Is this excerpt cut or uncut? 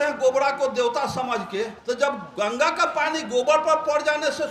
cut